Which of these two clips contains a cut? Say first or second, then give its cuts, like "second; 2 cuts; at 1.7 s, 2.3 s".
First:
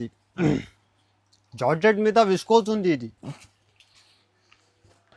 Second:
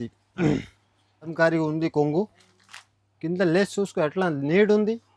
second; 1 cut; at 1.3 s